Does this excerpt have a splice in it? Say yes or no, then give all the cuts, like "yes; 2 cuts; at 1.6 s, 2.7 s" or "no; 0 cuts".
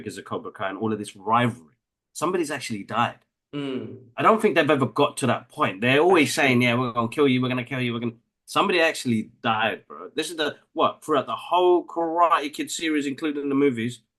no; 0 cuts